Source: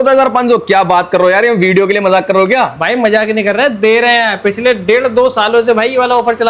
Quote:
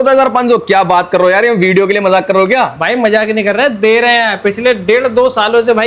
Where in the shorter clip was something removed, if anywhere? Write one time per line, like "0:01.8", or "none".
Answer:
none